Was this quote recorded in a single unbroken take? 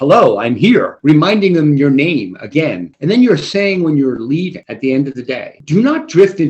no; 4 cuts; at 0.9 s, 2.9 s, 4.6 s, 5.6 s

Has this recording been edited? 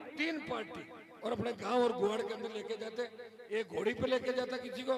no; 0 cuts

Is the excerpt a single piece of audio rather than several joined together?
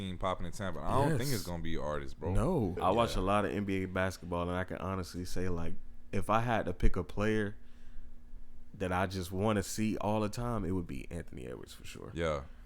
no; 1 cut; at 2.8 s

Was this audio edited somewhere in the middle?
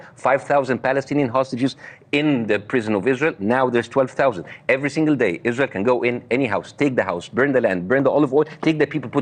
no; 0 cuts

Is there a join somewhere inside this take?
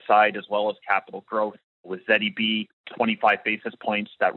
yes; 2 cuts; at 2.0 s, 2.8 s

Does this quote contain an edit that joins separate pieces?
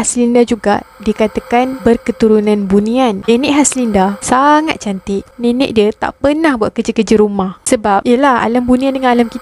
yes; 3 cuts; at 3.2 s, 5.2 s, 7.6 s

